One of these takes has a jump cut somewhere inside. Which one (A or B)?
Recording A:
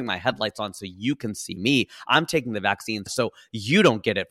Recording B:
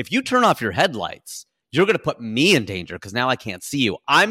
A